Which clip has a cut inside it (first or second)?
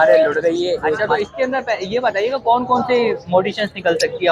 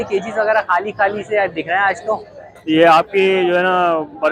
first